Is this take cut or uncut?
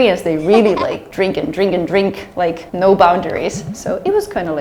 uncut